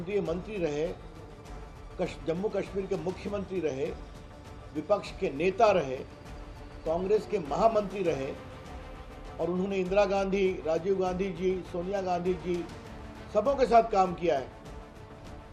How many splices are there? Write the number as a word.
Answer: zero